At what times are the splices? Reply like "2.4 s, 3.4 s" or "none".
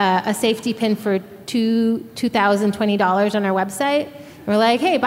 none